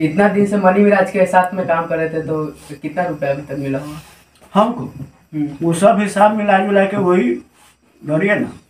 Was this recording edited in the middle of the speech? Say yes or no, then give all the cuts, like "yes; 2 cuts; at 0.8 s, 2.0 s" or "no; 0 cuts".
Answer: no; 0 cuts